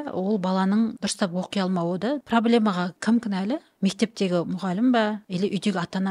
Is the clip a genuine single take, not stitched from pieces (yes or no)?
no